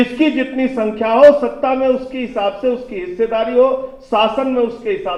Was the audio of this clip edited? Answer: no; 0 cuts

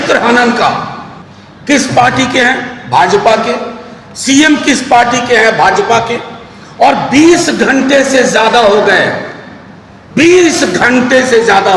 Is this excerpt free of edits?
no; 1 cut; at 1.5 s

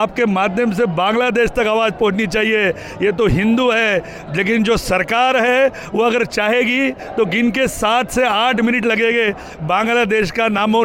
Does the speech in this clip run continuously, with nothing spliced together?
yes; 0 cuts

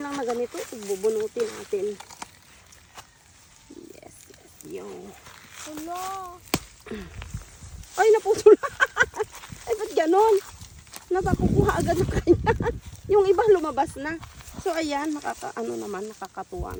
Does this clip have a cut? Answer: no; 0 cuts

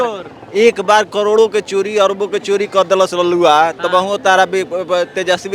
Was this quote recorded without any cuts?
yes; 0 cuts

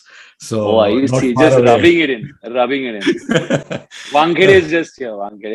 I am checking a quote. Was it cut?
no; 0 cuts

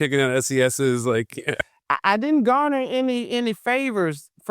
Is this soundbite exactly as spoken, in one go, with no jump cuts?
no; 1 cut; at 1.6 s

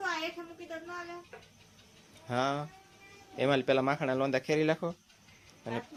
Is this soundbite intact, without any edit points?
yes; 0 cuts

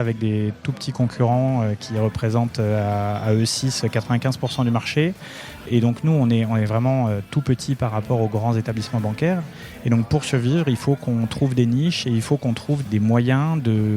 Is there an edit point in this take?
yes; 2 cuts; at 5.7 s, 12.8 s

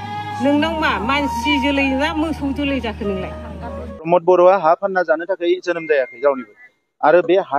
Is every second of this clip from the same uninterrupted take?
no; 1 cut; at 4.0 s

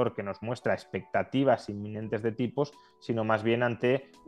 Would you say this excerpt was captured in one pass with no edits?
yes; 0 cuts

